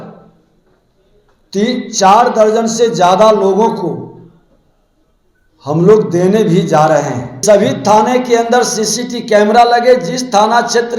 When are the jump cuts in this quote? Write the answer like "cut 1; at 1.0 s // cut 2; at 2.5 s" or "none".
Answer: cut 1; at 7.4 s